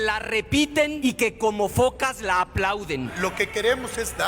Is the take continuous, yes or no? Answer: no